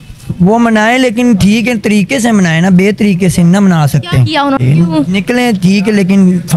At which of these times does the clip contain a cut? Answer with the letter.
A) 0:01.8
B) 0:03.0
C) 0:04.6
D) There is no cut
C